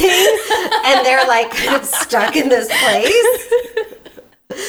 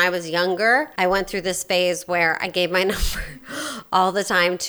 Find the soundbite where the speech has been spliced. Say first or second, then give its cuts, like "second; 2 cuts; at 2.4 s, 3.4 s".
second; 1 cut; at 0.9 s